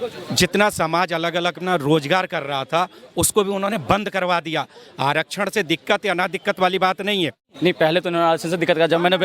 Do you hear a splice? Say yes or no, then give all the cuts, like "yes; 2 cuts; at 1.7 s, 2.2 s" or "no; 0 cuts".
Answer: yes; 1 cut; at 7.5 s